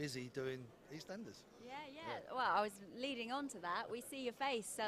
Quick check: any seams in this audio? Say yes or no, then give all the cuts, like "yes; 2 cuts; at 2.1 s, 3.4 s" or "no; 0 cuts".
no; 0 cuts